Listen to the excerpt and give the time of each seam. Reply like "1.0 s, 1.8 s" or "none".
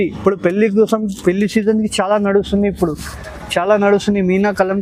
none

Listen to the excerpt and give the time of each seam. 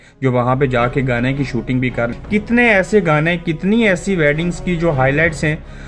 2.1 s

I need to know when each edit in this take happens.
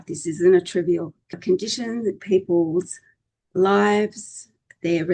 1.3 s

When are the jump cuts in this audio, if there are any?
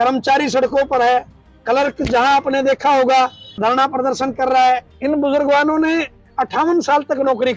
4.9 s

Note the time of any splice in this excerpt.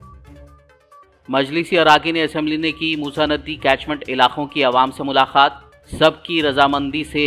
1.0 s

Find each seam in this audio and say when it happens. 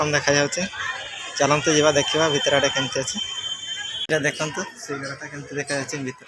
4.1 s

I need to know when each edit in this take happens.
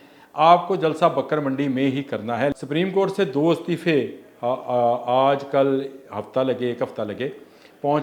2.5 s

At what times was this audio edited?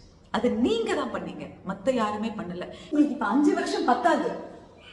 2.9 s

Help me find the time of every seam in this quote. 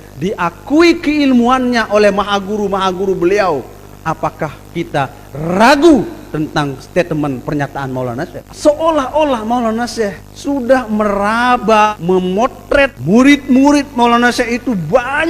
8.4 s, 10.3 s, 11.9 s, 13.0 s

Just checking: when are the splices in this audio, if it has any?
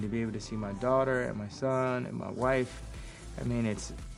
none

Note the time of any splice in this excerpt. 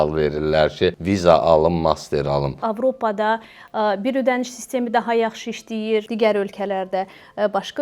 1.0 s, 2.6 s, 6.1 s

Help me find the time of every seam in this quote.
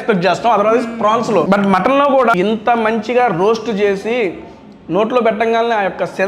1.5 s, 2.3 s

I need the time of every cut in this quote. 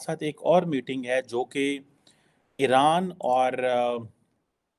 none

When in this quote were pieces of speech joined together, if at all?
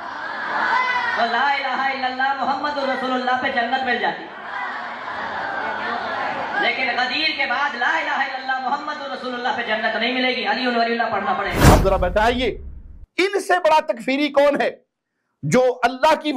11.5 s

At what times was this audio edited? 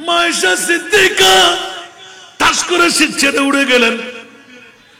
none

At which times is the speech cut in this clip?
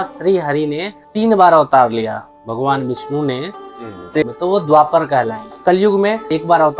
4.2 s

